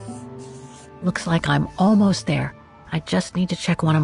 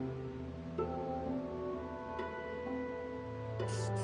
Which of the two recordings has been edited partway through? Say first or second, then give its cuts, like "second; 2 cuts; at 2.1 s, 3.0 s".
first; 1 cut; at 1.0 s